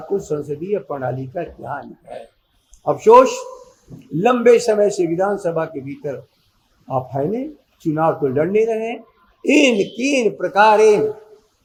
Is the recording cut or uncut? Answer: uncut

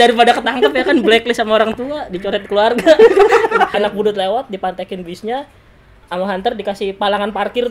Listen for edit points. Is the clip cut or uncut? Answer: cut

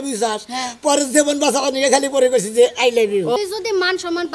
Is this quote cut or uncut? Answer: cut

